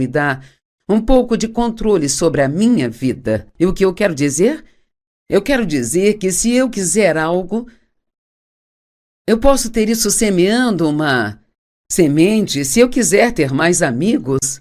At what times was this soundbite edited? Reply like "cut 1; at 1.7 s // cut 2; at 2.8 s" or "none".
none